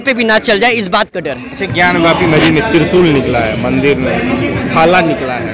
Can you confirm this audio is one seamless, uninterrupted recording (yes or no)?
yes